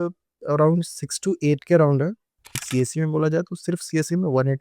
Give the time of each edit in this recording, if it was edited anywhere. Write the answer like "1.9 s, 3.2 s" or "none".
2.6 s